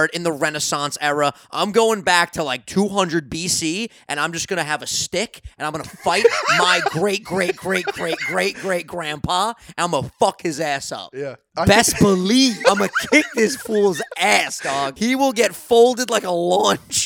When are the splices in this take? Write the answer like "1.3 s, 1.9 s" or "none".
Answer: 11.4 s, 12.6 s, 14.9 s